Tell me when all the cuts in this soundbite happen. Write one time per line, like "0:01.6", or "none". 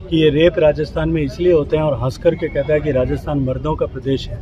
none

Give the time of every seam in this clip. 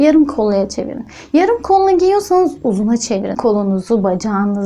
0:03.4

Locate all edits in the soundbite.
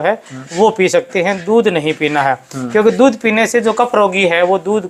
none

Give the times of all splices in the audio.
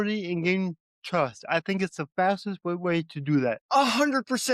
0:03.6

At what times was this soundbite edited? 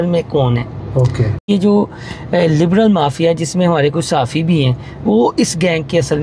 0:01.5

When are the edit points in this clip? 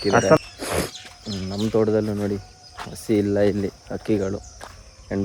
none

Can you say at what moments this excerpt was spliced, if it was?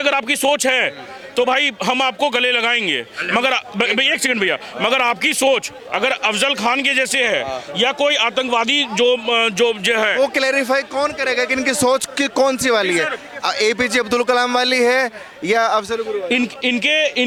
none

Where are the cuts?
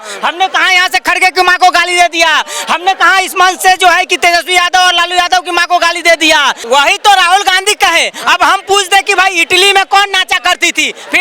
0:06.6

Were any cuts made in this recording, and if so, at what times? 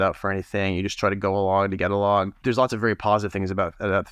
0:02.4

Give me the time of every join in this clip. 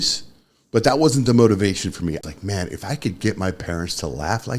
0:02.2

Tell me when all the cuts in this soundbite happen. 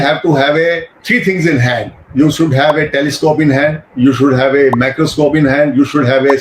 0:00.9

